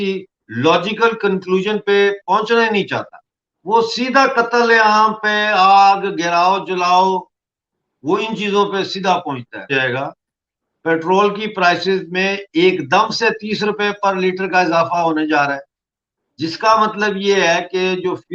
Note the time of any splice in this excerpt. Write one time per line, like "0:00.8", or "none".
0:09.7